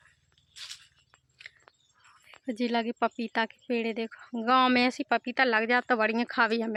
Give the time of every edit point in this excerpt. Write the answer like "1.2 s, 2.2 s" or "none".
none